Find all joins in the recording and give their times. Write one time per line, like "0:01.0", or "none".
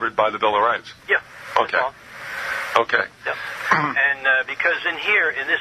0:03.9